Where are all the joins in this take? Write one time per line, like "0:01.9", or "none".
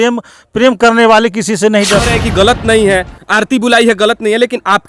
0:02.1